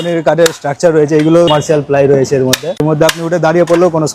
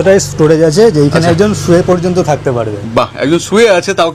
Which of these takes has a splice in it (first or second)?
first